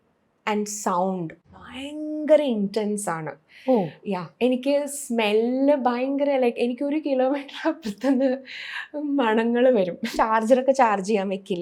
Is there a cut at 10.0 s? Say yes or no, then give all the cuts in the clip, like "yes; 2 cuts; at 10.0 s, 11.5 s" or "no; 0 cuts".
yes; 1 cut; at 10.0 s